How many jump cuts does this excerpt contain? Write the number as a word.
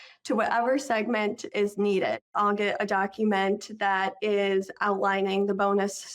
two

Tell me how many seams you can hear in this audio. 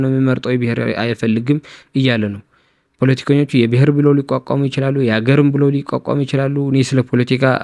zero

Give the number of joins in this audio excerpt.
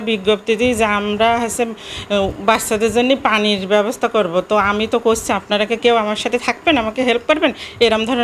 zero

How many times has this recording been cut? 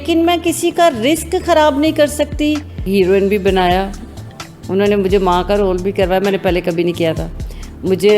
one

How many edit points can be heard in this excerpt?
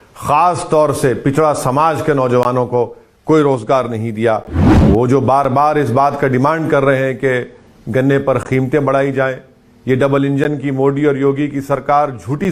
one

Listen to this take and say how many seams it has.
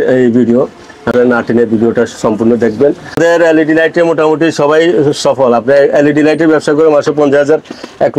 two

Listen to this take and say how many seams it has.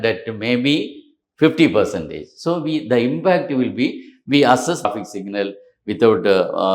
one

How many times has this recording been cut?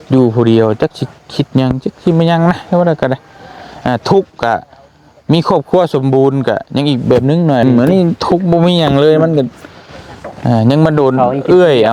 one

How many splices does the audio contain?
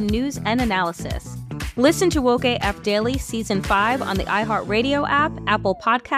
zero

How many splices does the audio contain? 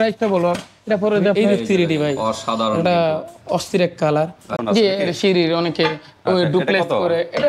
two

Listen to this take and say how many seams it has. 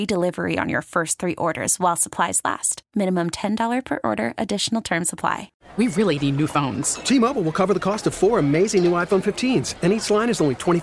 one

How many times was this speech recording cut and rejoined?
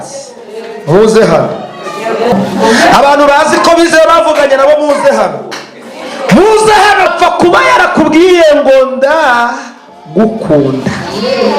one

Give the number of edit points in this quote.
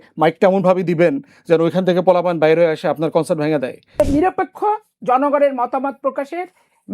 one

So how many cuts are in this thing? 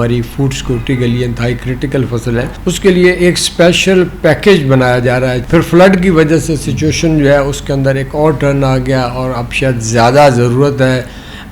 two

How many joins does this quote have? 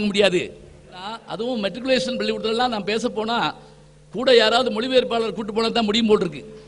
one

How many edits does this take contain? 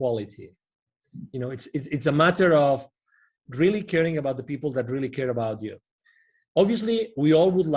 zero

